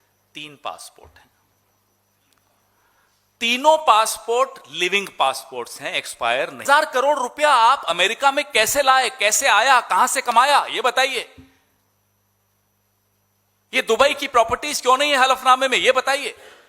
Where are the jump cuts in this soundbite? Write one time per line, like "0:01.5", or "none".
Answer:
0:06.6